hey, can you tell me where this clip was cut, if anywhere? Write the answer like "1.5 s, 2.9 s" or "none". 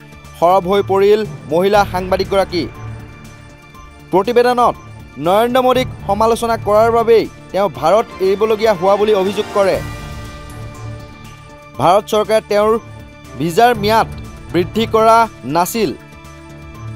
9.8 s, 11.8 s, 16.0 s